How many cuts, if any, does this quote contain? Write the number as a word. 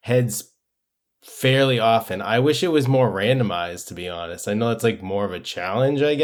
zero